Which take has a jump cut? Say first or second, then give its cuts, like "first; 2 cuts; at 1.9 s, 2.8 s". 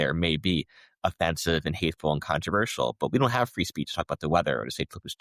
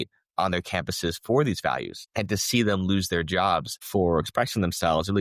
second; 2 cuts; at 2.0 s, 3.8 s